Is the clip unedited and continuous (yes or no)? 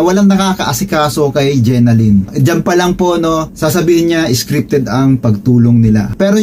yes